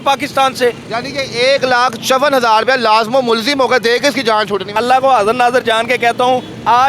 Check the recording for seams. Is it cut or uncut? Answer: cut